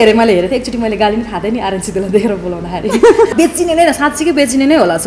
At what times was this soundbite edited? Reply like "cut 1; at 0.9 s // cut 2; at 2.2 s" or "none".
cut 1; at 3.3 s